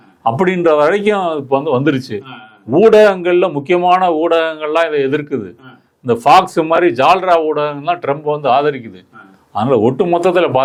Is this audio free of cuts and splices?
yes; 0 cuts

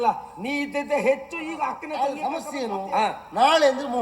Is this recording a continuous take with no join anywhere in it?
no; 1 cut; at 1.9 s

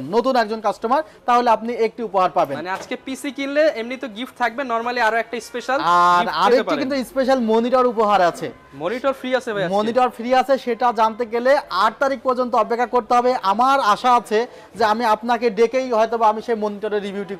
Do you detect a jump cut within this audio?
no; 0 cuts

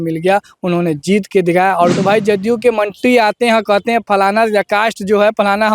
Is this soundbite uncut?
no; 1 cut; at 2.0 s

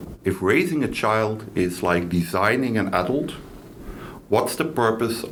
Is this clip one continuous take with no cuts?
yes; 0 cuts

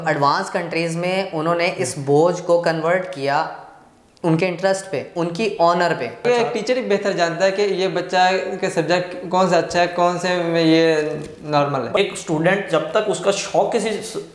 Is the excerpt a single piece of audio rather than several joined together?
no; 1 cut; at 6.2 s

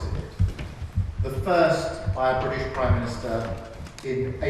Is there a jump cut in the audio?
no; 0 cuts

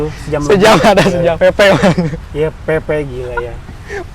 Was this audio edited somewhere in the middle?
yes; 1 cut; at 1.4 s

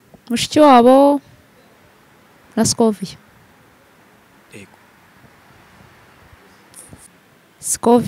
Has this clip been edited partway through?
yes; 1 cut; at 7.1 s

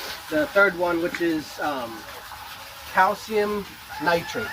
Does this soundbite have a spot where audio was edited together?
no; 0 cuts

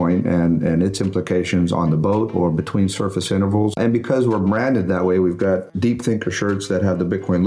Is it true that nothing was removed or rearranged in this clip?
no; 2 cuts; at 3.8 s, 5.7 s

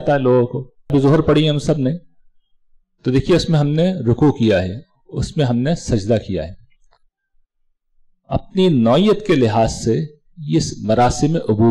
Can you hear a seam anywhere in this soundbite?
yes; 1 cut; at 0.9 s

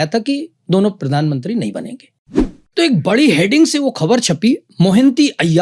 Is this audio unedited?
no; 1 cut; at 2.4 s

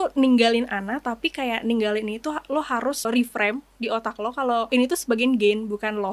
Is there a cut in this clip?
yes; 2 cuts; at 3.0 s, 4.7 s

